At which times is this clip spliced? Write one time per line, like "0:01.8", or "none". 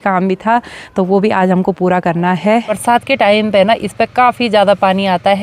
0:02.7